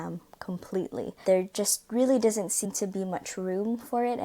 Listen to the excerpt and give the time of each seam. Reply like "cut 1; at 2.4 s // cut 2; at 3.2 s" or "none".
cut 1; at 1.2 s